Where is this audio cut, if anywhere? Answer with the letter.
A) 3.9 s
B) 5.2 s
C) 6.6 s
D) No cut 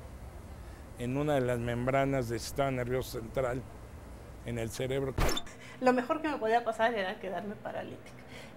B